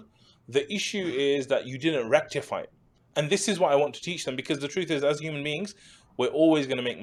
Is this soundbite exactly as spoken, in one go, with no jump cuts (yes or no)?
yes